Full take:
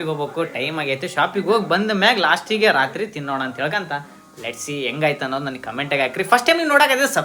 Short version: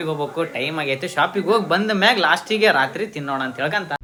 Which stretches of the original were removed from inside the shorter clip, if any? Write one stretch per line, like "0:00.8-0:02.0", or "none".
none